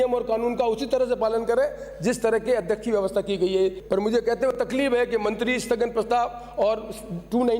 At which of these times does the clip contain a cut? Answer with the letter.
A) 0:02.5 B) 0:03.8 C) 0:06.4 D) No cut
B